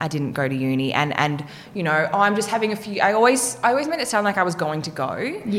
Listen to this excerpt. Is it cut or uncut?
uncut